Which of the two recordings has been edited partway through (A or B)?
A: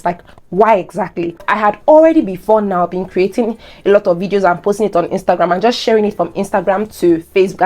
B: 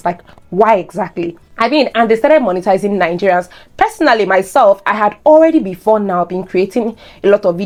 A